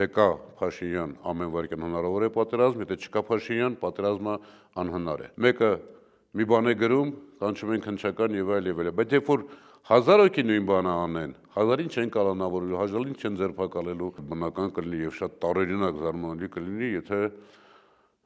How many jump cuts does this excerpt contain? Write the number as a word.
two